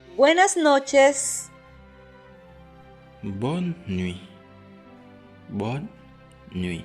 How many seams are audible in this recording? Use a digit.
1